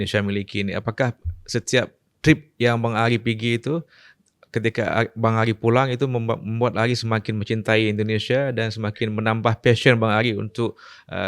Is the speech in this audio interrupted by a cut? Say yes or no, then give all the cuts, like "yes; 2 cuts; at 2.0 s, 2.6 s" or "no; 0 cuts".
no; 0 cuts